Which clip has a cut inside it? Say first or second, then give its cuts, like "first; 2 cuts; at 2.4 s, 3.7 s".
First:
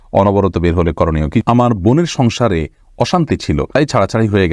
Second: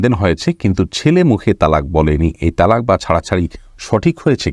first; 2 cuts; at 1.4 s, 3.8 s